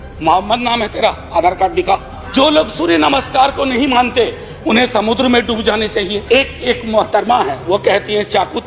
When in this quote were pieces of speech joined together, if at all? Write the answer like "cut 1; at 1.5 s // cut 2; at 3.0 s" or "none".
cut 1; at 2.2 s // cut 2; at 6.2 s

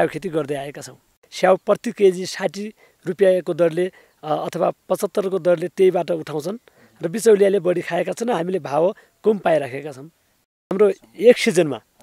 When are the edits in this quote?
cut 1; at 1.2 s // cut 2; at 10.7 s

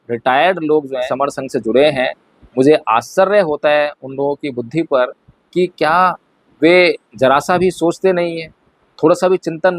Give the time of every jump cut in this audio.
cut 1; at 1.1 s

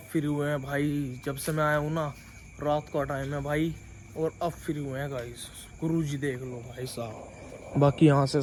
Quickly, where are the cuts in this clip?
none

